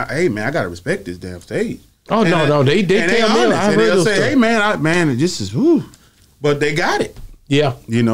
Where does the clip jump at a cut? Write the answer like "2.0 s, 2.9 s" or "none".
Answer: none